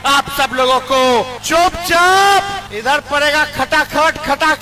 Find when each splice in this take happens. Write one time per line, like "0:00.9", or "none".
0:01.1
0:02.7